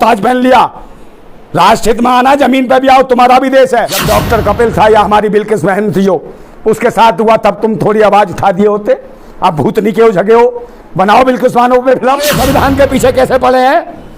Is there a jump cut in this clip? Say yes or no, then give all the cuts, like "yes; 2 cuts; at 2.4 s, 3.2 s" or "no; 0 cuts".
yes; 2 cuts; at 4.0 s, 12.4 s